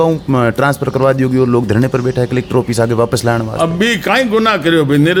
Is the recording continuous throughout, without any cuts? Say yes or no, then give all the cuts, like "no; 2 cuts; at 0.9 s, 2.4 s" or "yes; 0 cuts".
yes; 0 cuts